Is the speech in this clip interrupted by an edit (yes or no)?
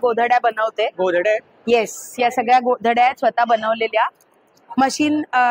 no